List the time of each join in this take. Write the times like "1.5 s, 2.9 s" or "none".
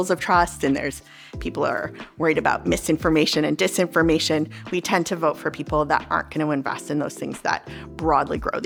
none